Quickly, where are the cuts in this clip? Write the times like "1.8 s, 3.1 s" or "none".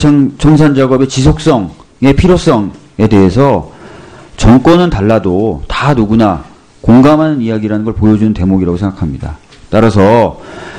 none